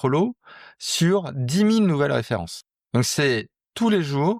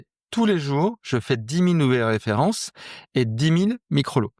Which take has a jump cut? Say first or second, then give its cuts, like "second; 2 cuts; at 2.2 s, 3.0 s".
first; 1 cut; at 2.5 s